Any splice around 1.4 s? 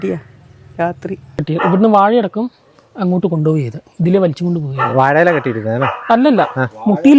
yes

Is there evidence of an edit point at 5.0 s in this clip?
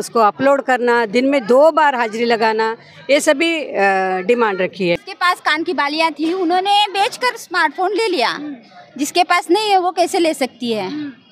yes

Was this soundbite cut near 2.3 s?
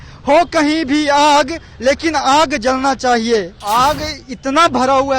no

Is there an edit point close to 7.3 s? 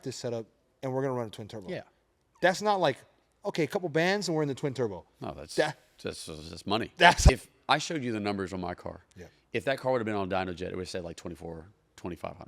yes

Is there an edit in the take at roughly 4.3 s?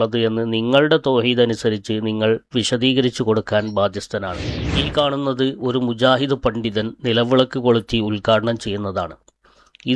yes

